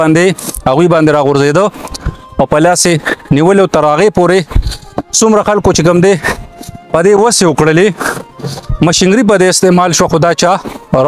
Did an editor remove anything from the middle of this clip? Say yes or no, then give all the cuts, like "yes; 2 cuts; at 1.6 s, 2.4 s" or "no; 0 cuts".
no; 0 cuts